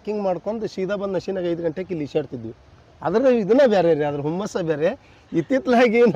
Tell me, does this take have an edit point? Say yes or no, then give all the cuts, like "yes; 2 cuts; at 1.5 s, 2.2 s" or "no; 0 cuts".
no; 0 cuts